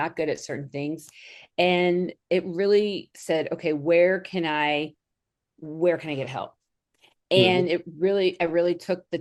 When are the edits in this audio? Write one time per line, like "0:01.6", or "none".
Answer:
none